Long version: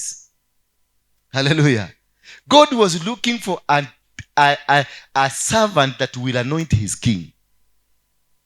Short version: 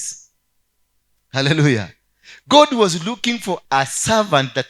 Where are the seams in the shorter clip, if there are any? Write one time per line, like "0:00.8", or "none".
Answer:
0:03.6